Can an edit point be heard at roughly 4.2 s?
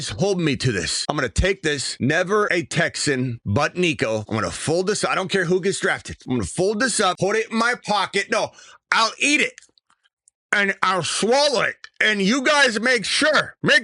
yes; 7 cuts; at 0.9 s, 1.9 s, 2.5 s, 3.4 s, 4.2 s, 6.1 s, 7.2 s

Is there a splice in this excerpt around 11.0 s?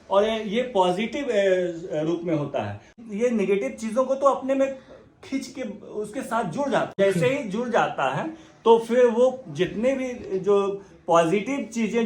no; 2 cuts; at 3.0 s, 7.0 s

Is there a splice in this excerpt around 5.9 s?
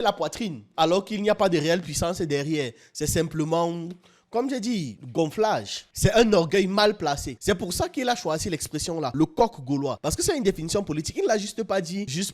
yes; 1 cut; at 5.9 s

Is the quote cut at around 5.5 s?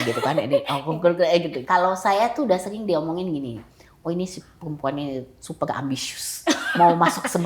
no; 1 cut; at 1.6 s

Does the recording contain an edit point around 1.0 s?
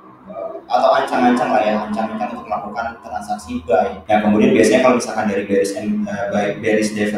no; 1 cut; at 4.0 s

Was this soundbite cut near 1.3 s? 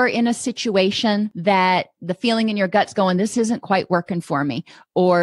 yes; 1 cut; at 1.3 s

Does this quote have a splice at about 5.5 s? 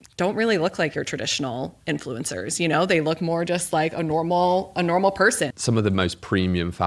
yes; 1 cut; at 5.5 s

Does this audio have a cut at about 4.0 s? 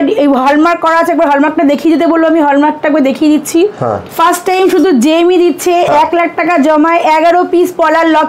yes; 1 cut; at 4.0 s

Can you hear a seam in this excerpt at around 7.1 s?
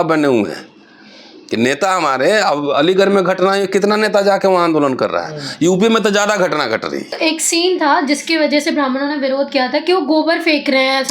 yes; 1 cut; at 7.1 s

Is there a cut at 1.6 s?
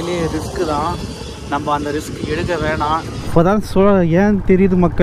no; 1 cut; at 3.3 s

